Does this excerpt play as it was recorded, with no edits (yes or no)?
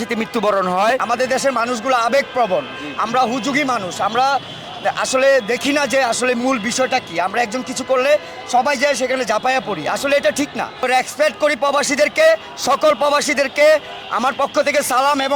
no